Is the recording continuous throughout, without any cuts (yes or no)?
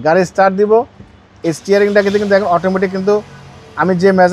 yes